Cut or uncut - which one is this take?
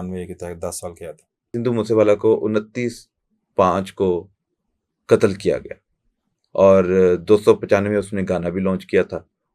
cut